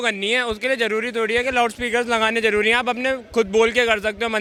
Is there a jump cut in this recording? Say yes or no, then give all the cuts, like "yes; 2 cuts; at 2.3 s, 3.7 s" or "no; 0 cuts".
no; 0 cuts